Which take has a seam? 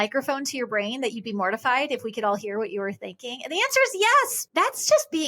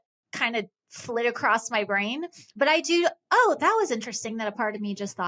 first; 1 cut; at 4.4 s

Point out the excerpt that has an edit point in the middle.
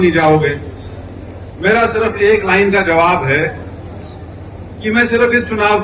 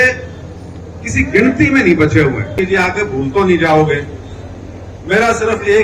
second; 1 cut; at 2.5 s

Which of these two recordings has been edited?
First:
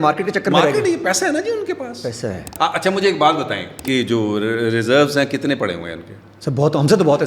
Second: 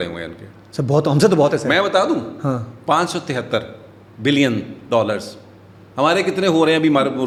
first; 2 cuts; at 2.5 s, 3.8 s

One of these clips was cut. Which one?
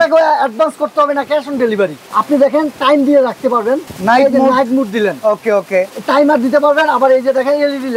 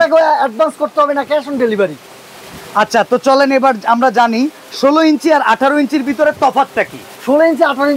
first; 2 cuts; at 2.1 s, 3.9 s

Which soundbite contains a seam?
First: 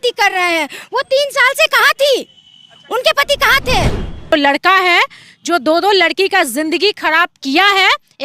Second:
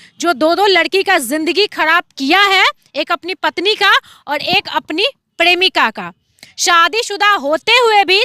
first; 1 cut; at 4.3 s

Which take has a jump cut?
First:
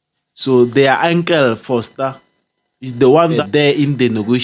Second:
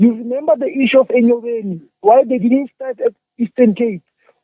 first; 1 cut; at 3.4 s

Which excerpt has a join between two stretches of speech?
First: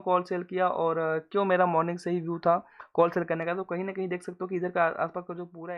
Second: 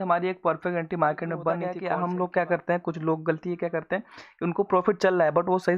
second; 1 cut; at 1.7 s

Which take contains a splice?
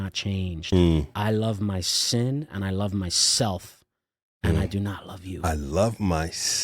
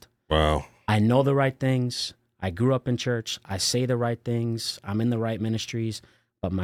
first; 1 cut; at 1.1 s

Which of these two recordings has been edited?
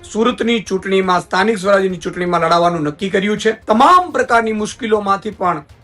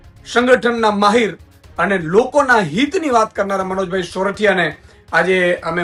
first; 1 cut; at 3.6 s

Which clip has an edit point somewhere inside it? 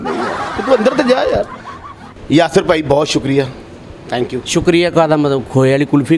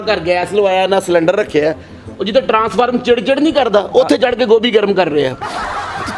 first; 1 cut; at 2.2 s

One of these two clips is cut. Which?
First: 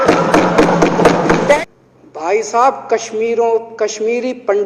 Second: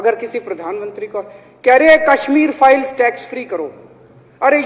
first; 1 cut; at 1.6 s

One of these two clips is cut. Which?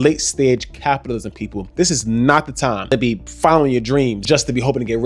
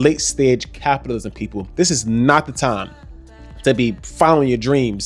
first; 2 cuts; at 2.9 s, 4.2 s

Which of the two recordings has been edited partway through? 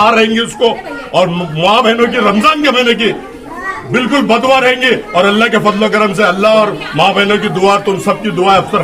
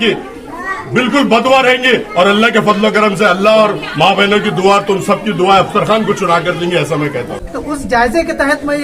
second; 1 cut; at 7.3 s

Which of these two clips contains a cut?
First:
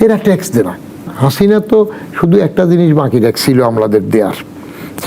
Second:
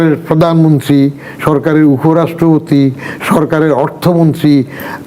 first; 1 cut; at 1.1 s

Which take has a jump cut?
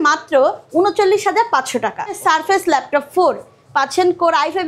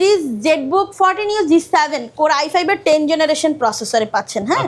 first; 1 cut; at 2.2 s

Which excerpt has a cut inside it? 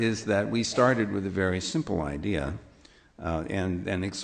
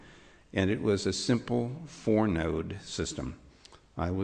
second; 1 cut; at 3.0 s

